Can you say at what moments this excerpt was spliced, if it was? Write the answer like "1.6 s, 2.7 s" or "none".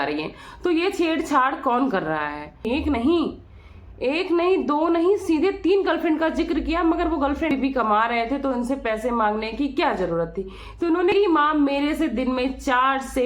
2.6 s, 7.5 s, 11.1 s